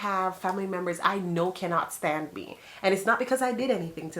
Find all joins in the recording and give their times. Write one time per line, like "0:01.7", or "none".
0:01.0